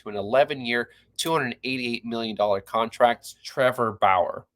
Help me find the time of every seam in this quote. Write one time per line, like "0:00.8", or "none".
0:03.4